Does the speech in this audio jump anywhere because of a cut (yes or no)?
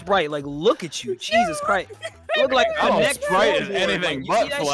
no